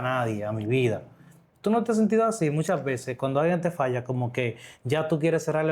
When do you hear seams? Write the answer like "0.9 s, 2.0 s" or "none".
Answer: none